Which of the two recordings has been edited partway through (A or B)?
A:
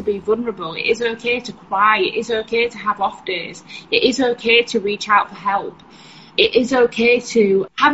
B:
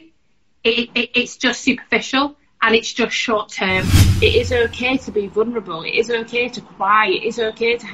B